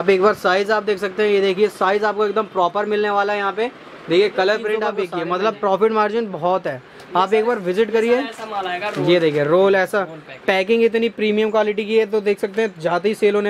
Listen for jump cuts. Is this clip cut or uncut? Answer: cut